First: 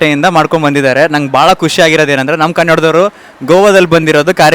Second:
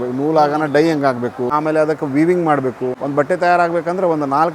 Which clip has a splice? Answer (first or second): second